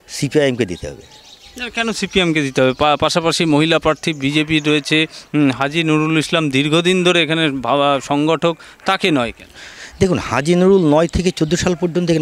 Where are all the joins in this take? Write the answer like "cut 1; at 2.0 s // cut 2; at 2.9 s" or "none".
none